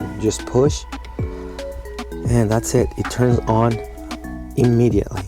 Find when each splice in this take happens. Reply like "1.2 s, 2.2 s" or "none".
none